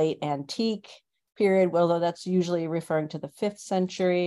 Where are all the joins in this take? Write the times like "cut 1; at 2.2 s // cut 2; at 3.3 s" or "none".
none